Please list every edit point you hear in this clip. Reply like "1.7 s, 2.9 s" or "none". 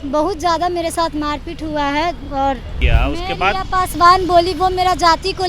2.8 s